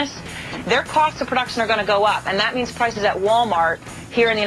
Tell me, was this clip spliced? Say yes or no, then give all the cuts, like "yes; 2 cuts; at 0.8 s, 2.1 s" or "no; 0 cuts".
no; 0 cuts